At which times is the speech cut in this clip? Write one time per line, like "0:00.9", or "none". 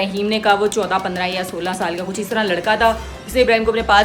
none